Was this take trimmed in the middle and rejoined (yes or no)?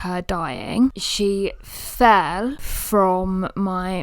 yes